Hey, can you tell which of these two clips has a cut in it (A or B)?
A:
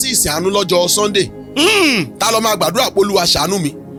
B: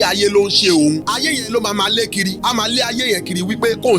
B